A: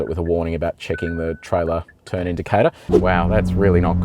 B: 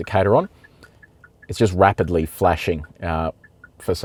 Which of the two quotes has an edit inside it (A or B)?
A